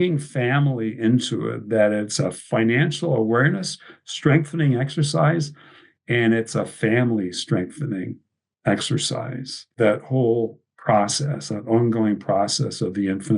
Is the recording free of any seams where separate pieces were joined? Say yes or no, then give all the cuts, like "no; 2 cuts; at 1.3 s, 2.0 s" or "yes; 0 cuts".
no; 1 cut; at 9.7 s